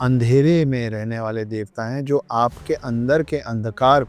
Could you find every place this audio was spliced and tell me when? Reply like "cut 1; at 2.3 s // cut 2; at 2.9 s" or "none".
none